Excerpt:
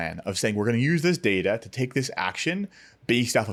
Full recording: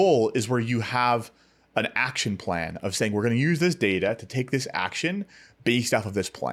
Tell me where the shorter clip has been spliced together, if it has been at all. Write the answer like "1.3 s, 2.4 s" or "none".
none